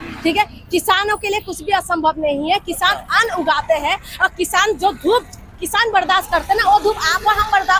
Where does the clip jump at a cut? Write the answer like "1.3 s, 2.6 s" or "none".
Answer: none